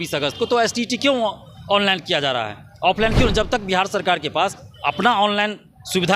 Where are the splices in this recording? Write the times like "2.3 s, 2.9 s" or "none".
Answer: none